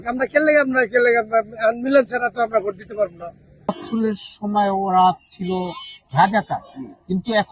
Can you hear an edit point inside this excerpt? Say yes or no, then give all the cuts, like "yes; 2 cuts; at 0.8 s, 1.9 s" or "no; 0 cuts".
yes; 1 cut; at 3.8 s